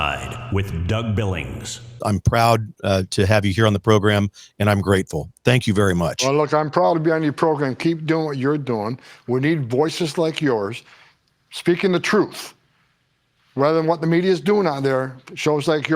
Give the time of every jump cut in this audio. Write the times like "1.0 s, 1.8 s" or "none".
2.0 s